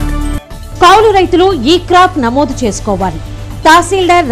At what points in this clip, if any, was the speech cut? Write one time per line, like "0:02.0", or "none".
none